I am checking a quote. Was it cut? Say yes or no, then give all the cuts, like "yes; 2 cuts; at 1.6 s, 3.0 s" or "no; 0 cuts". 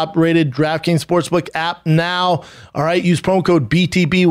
no; 0 cuts